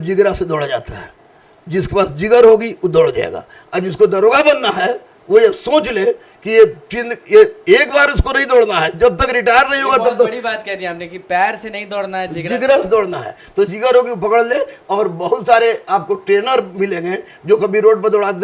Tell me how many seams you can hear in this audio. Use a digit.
0